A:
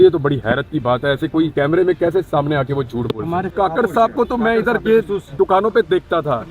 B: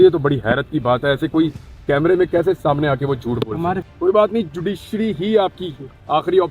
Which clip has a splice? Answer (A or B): A